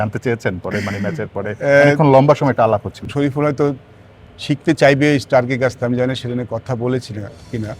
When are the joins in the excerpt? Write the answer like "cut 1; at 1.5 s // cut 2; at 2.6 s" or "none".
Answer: cut 1; at 3.0 s